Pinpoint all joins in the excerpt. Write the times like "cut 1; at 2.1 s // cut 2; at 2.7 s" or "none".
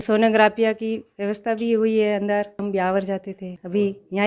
cut 1; at 2.6 s